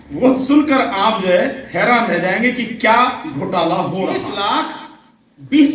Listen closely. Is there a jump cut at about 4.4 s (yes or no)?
yes